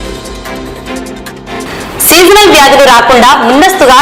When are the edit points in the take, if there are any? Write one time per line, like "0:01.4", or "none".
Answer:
none